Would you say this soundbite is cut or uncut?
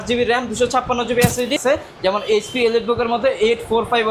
cut